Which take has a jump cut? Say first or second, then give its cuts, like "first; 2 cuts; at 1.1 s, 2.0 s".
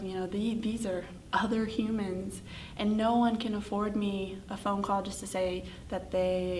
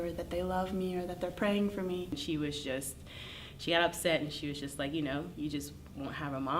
second; 1 cut; at 2.2 s